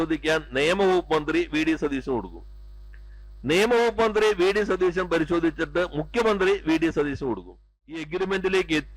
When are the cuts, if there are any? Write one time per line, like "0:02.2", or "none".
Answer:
0:08.1